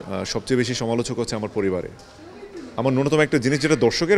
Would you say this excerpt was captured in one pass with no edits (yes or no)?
yes